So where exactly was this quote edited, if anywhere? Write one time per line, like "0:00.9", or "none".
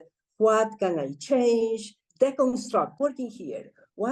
0:02.0
0:02.9